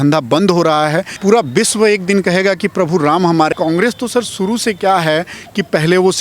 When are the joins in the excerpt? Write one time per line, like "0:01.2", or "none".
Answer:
0:01.1
0:03.5

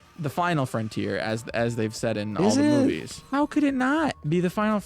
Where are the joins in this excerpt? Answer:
0:03.1

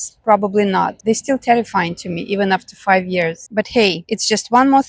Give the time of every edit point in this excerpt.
none

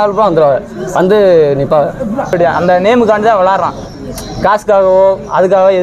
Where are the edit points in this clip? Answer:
0:02.3

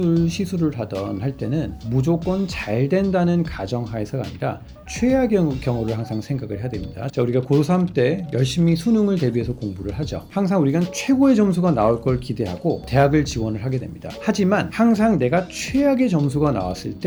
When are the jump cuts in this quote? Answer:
none

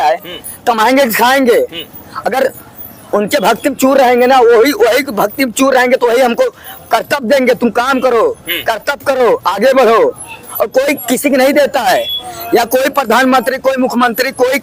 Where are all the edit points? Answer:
none

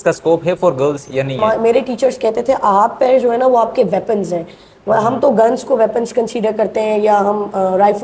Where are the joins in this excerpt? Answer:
0:01.4

